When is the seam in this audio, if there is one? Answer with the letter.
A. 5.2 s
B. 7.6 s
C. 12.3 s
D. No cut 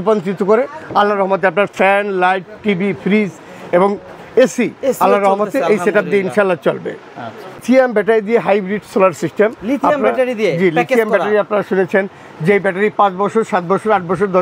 B